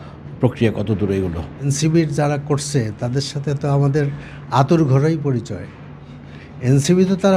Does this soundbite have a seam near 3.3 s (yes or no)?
no